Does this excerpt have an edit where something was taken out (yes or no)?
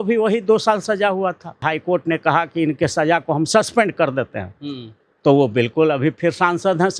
yes